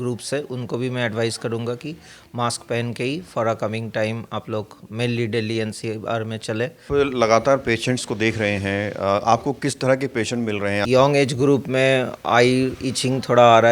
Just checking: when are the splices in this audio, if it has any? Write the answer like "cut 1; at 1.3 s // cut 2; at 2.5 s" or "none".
cut 1; at 6.8 s // cut 2; at 10.8 s